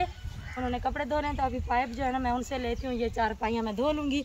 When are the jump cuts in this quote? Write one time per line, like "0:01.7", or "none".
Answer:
none